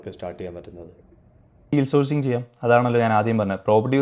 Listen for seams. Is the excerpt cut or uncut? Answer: uncut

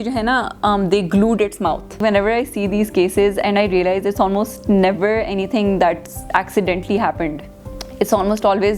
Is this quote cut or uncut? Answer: cut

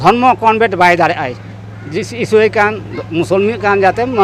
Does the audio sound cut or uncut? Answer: uncut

